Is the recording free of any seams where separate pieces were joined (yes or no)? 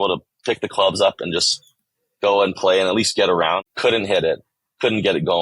no